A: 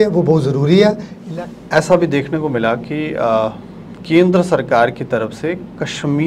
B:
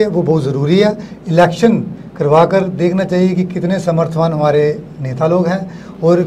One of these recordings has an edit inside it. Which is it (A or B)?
A